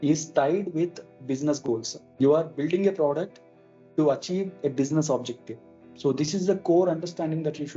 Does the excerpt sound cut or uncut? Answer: cut